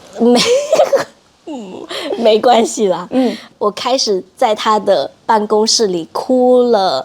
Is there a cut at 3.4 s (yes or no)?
yes